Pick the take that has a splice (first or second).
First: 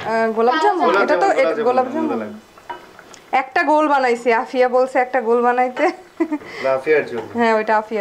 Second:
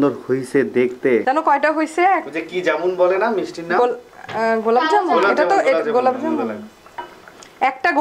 second